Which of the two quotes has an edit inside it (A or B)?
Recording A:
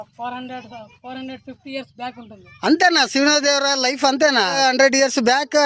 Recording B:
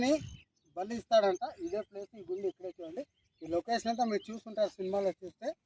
A